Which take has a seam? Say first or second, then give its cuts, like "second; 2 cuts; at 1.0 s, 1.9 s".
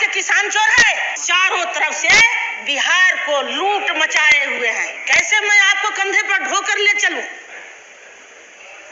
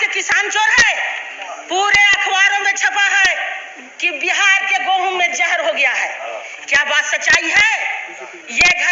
first; 2 cuts; at 1.1 s, 4.9 s